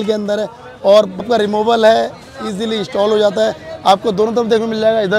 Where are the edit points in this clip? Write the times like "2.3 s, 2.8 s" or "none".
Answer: 1.2 s